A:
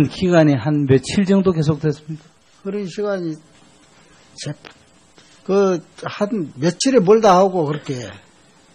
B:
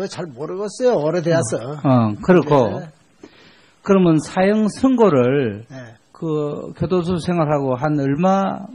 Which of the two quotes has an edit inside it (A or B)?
A